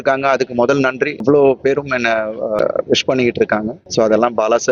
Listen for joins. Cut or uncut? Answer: cut